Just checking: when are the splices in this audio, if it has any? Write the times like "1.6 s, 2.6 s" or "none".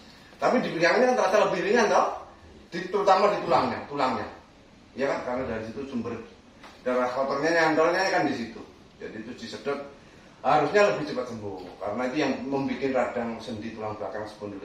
none

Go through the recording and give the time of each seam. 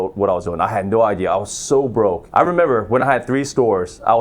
2.2 s

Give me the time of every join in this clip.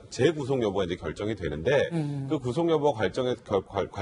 1.4 s

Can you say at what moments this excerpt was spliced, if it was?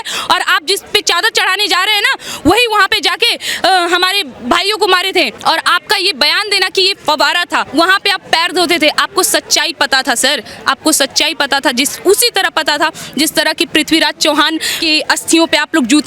5.3 s, 7.7 s, 14.7 s

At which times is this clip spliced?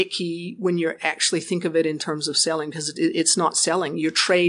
none

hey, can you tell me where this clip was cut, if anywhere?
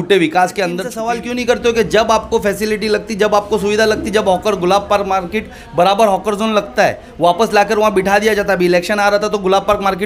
0.9 s

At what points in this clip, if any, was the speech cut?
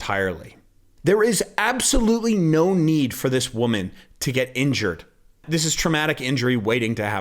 0.9 s, 5.4 s

